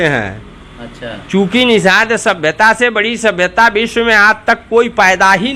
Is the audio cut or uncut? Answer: uncut